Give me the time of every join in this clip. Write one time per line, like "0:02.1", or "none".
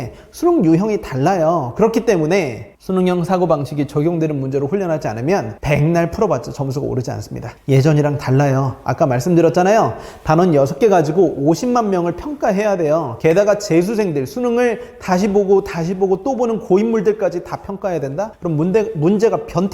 none